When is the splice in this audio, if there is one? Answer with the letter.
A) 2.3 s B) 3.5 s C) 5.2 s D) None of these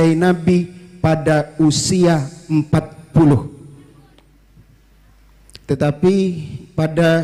D